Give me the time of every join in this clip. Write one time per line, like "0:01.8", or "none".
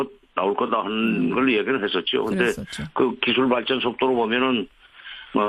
0:04.3